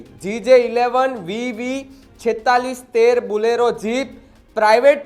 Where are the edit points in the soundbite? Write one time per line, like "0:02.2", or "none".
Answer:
none